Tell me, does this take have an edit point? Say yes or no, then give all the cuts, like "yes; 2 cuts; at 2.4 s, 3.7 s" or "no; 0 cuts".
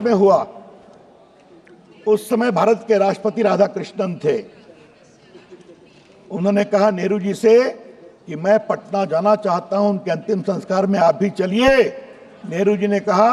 no; 0 cuts